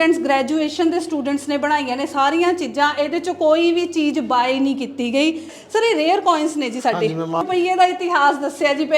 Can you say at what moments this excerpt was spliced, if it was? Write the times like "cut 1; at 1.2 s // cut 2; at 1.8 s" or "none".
cut 1; at 5.5 s // cut 2; at 7.4 s